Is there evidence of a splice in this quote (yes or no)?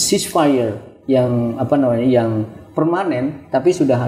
no